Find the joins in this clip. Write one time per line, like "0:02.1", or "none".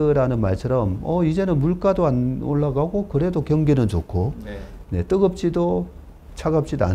none